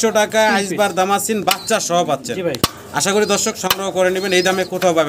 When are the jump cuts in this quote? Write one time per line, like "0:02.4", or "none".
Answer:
none